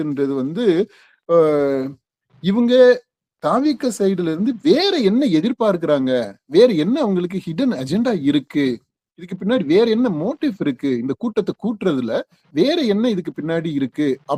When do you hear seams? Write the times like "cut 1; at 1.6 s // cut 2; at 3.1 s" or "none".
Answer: none